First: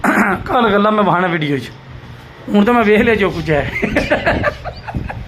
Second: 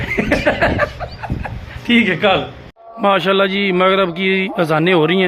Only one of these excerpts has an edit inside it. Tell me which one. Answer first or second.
second